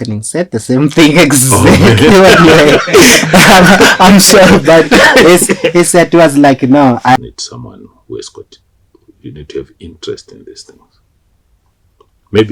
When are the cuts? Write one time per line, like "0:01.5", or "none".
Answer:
0:07.2